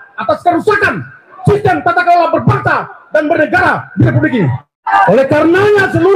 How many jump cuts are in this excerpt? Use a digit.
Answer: 1